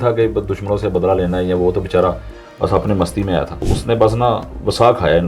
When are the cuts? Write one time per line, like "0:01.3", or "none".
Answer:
0:03.7